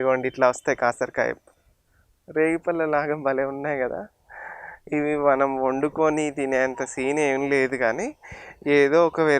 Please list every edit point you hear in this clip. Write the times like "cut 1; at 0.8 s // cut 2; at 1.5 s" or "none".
cut 1; at 1.5 s